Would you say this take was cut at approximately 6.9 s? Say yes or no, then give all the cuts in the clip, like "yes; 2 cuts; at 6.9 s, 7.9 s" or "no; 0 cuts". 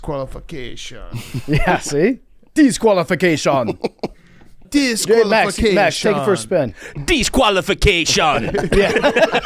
no; 1 cut; at 4.6 s